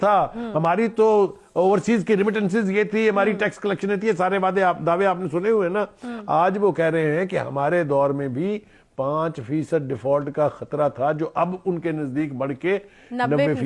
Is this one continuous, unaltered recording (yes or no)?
yes